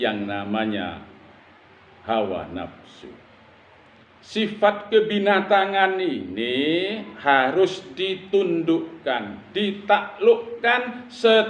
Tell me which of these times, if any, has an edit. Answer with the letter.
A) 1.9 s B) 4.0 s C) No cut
B